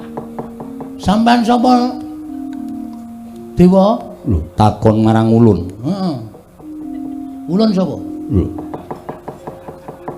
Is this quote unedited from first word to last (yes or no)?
no